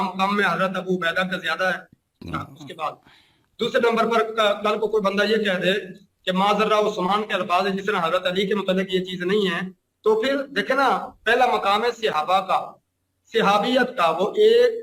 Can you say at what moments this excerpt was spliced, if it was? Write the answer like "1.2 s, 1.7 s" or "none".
none

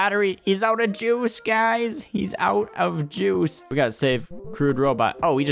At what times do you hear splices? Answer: 3.7 s

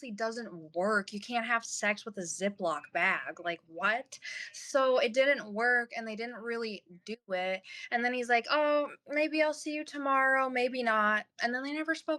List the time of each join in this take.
none

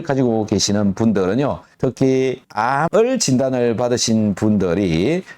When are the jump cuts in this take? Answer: 1.7 s

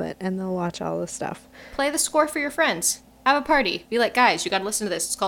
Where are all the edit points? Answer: none

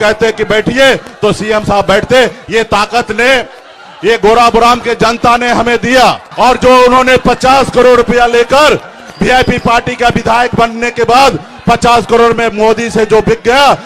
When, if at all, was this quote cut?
6.3 s

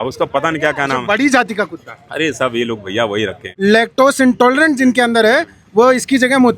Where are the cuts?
3.4 s

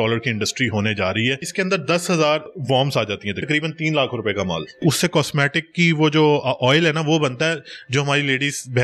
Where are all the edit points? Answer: 1.5 s, 2.5 s, 4.8 s

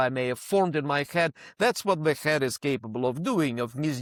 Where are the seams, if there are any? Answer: none

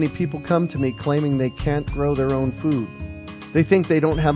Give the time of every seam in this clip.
none

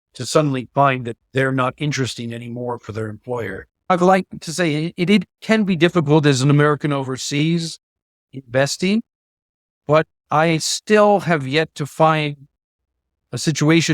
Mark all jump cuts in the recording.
3.9 s

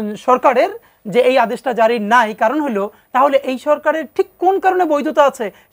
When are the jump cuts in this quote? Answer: none

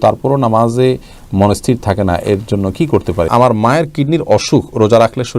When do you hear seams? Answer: 3.3 s

